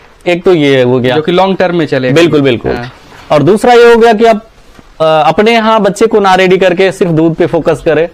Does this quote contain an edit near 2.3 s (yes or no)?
no